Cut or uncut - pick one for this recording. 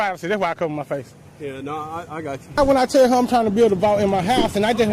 cut